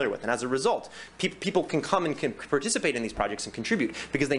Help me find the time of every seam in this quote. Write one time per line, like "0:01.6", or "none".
none